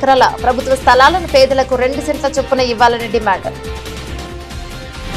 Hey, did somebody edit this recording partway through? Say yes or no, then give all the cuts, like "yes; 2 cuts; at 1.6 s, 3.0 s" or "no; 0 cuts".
yes; 1 cut; at 3.5 s